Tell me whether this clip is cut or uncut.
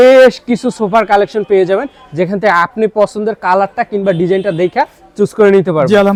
uncut